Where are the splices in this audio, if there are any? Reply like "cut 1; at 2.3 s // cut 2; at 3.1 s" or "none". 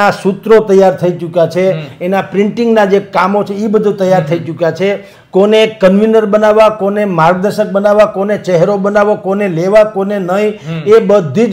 none